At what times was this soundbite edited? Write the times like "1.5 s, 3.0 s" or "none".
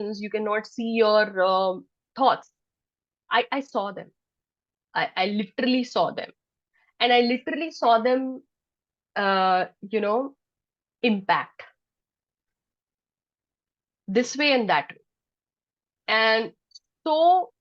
none